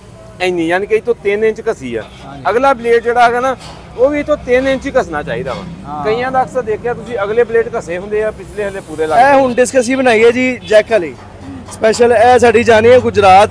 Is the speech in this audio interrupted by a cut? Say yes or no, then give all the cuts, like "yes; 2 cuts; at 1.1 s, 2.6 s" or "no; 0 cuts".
yes; 1 cut; at 9.2 s